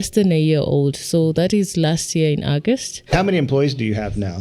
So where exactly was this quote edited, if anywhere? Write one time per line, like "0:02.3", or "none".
0:03.1